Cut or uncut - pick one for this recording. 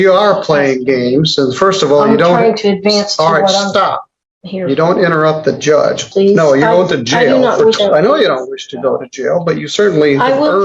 cut